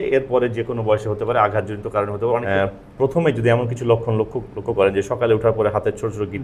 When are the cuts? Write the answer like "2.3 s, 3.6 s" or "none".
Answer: 2.4 s